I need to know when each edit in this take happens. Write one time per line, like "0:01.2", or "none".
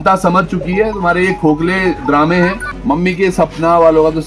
0:02.7